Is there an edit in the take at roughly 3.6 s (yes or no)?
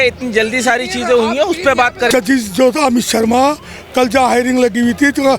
no